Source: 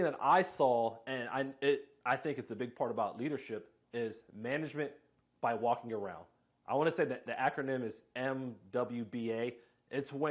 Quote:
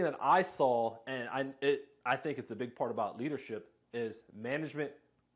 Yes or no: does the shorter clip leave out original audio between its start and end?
no